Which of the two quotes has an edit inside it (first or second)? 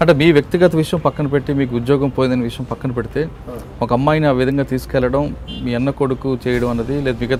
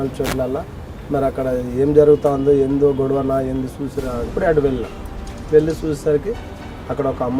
second